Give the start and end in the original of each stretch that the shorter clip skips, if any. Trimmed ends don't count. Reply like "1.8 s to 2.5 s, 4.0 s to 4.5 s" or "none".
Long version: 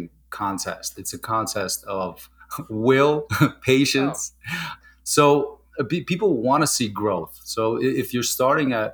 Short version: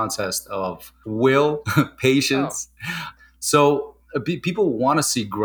2.3 s to 2.6 s